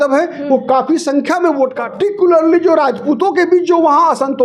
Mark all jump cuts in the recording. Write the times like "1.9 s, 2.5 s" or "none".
1.8 s